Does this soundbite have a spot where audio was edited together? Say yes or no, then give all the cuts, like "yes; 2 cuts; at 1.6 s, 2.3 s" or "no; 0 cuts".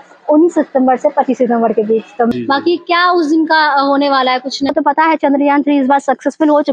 yes; 2 cuts; at 2.3 s, 4.7 s